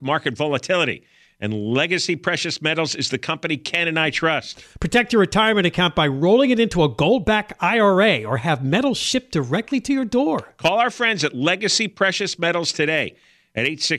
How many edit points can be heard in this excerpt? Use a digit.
0